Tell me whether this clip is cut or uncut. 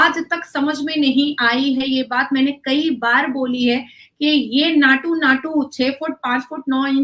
uncut